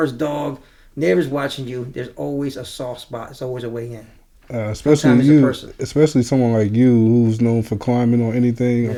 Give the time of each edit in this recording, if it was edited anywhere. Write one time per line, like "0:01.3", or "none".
none